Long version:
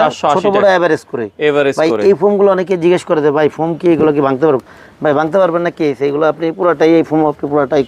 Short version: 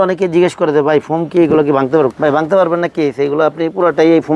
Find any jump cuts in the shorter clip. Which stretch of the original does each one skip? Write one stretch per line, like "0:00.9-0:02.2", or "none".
0:04.6-0:05.0